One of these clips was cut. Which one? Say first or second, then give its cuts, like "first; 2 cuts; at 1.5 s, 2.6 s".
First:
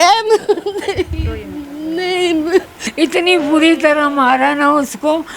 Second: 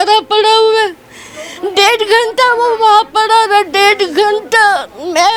first; 1 cut; at 2.8 s